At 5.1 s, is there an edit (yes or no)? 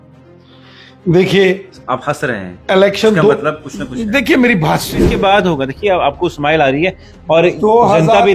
yes